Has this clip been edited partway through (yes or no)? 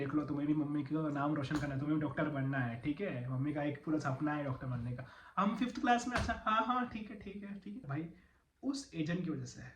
yes